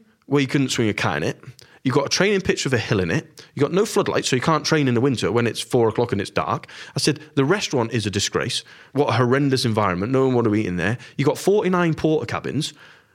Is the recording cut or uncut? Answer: uncut